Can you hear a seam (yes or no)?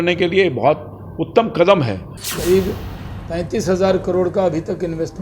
yes